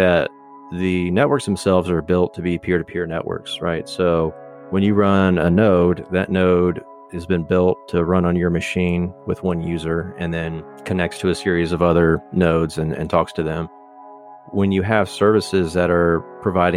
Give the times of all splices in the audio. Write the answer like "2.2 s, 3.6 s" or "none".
14.3 s